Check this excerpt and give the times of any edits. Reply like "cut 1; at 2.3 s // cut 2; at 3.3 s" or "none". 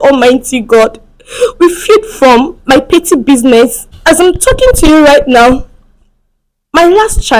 cut 1; at 3.9 s